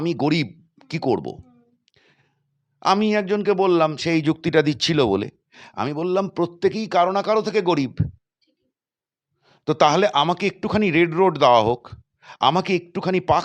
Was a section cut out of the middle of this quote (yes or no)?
no